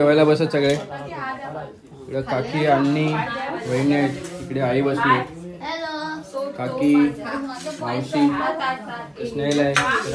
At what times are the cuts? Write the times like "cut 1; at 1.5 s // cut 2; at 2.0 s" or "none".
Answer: none